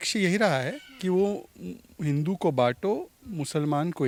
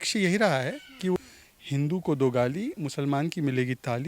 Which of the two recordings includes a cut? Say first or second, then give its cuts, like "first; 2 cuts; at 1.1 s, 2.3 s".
second; 1 cut; at 1.2 s